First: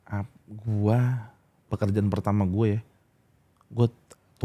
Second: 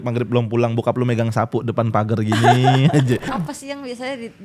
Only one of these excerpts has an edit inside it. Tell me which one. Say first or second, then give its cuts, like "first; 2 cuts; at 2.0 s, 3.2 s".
second; 1 cut; at 3.3 s